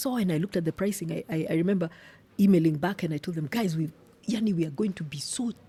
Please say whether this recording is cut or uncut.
uncut